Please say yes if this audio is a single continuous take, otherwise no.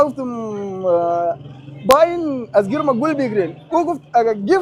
yes